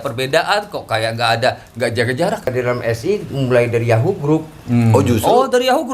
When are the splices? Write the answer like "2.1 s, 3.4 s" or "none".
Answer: 2.5 s